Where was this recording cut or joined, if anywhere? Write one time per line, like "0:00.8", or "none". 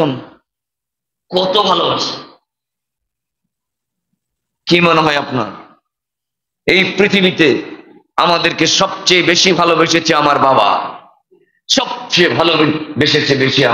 none